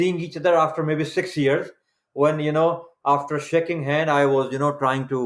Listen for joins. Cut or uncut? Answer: uncut